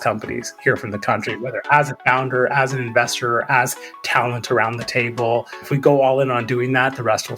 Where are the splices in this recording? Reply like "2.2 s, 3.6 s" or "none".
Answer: 5.7 s

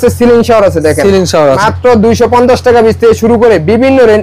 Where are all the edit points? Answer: 1.6 s

